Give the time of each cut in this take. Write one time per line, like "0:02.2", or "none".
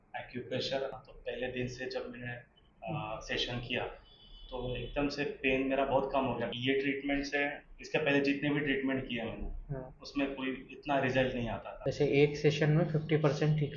0:01.1
0:06.6
0:11.7